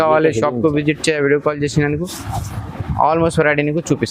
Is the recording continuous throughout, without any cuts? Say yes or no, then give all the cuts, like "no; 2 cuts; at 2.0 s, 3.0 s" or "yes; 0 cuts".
yes; 0 cuts